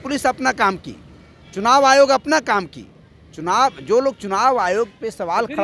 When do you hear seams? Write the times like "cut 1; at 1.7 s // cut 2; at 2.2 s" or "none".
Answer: none